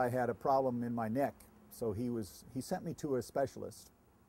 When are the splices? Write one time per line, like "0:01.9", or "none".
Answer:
none